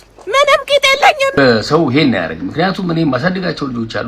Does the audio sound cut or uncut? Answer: cut